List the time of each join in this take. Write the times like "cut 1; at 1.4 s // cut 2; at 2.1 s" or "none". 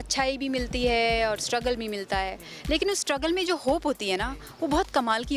none